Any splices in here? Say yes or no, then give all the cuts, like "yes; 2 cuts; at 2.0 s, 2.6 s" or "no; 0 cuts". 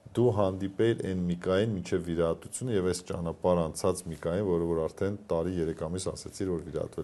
no; 0 cuts